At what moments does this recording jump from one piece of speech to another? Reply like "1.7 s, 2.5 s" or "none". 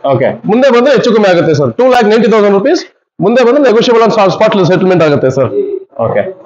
none